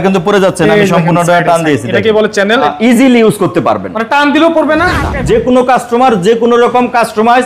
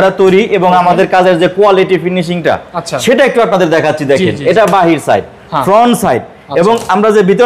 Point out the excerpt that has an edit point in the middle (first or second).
first